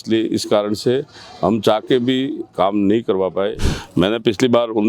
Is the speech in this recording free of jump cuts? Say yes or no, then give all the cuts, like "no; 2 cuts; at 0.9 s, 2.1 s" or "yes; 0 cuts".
no; 1 cut; at 3.6 s